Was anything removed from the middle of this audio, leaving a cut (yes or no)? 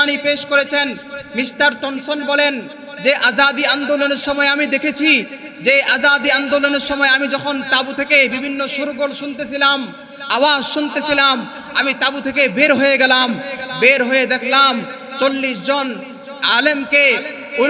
no